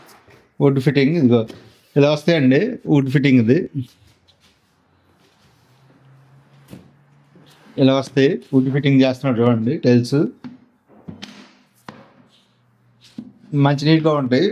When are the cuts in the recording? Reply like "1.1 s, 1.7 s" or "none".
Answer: none